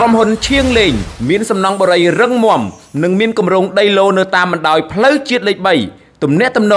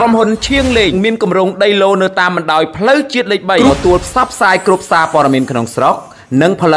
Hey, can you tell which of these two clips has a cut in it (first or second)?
second